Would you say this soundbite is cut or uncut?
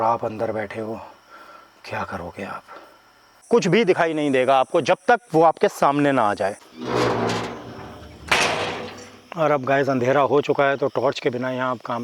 cut